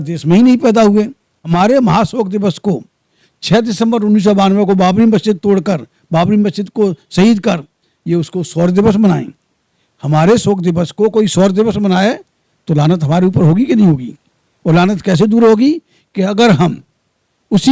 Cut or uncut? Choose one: cut